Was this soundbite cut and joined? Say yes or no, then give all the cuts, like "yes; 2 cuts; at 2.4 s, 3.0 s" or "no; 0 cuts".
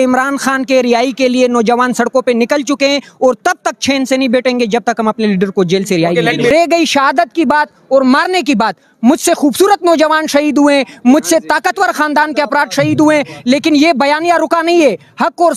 yes; 1 cut; at 6.5 s